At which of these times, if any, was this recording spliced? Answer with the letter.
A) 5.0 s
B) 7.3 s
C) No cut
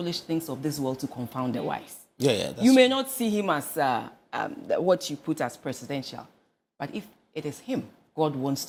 C